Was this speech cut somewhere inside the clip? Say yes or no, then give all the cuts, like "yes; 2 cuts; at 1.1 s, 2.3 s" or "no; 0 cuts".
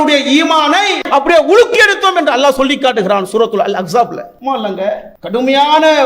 yes; 3 cuts; at 1.0 s, 4.3 s, 5.1 s